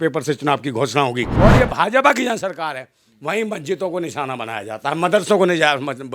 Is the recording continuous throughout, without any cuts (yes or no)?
no